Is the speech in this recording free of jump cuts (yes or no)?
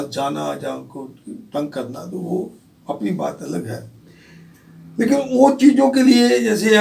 yes